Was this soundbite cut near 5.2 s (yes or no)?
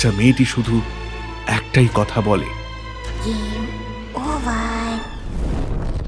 yes